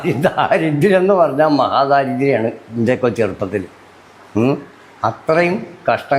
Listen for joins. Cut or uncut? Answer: uncut